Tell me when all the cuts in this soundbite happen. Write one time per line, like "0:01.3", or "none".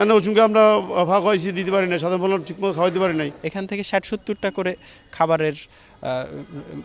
0:03.4